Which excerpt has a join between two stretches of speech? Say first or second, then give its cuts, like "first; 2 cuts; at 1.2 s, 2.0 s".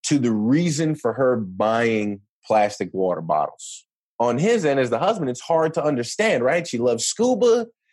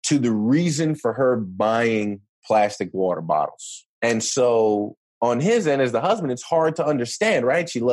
first; 1 cut; at 3.9 s